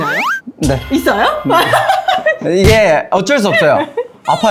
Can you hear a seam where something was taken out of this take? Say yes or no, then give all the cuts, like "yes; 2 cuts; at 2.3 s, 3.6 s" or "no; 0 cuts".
no; 0 cuts